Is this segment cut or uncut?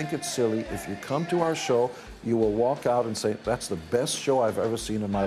uncut